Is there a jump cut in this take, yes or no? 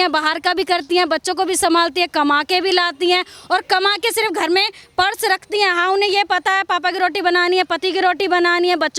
no